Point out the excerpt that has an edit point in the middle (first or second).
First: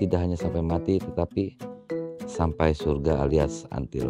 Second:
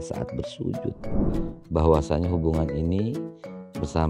second